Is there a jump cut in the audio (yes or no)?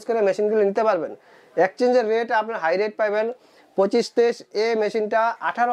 no